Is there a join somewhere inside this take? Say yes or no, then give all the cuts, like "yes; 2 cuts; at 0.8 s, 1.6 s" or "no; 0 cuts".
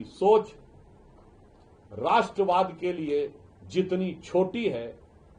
no; 0 cuts